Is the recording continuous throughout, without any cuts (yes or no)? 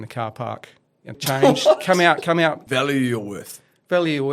no